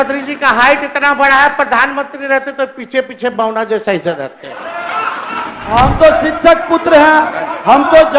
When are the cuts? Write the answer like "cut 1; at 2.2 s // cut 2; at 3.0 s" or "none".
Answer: cut 1; at 5.6 s

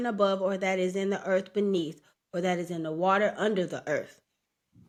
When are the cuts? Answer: none

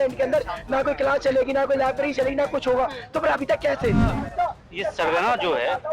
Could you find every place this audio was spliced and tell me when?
cut 1; at 4.1 s

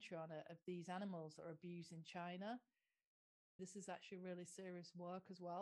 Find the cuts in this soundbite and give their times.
cut 1; at 3.5 s

